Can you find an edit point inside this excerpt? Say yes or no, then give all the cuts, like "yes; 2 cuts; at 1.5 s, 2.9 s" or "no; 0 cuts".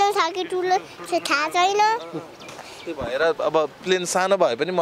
no; 0 cuts